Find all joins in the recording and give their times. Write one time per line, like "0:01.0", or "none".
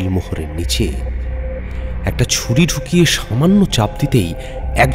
none